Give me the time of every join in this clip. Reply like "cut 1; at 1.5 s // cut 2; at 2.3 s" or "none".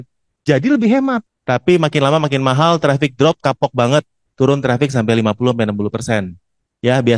cut 1; at 1.3 s

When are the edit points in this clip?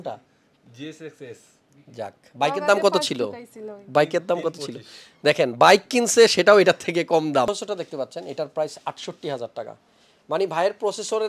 cut 1; at 7.5 s

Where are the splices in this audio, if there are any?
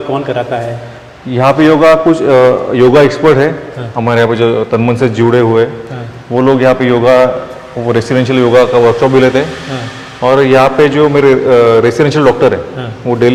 none

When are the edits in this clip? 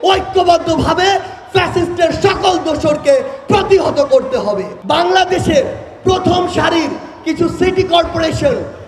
cut 1; at 4.7 s

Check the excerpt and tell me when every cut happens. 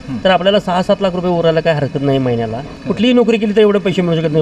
cut 1; at 2.7 s

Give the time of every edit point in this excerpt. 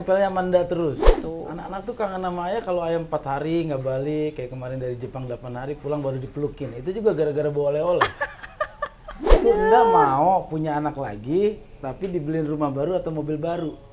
cut 1; at 1.1 s // cut 2; at 9.3 s

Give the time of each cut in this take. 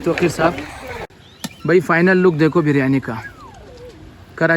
cut 1; at 1.2 s

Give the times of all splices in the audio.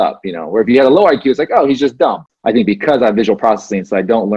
cut 1; at 2.3 s

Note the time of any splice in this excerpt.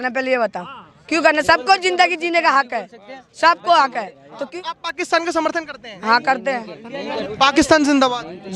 cut 1; at 4.6 s // cut 2; at 7.3 s

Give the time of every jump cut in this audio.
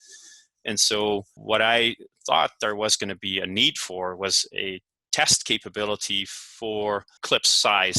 cut 1; at 1.3 s // cut 2; at 7.2 s

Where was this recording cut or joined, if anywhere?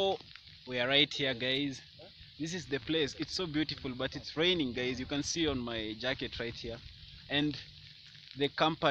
none

